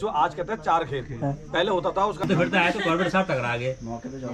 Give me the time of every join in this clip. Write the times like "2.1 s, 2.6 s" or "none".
2.2 s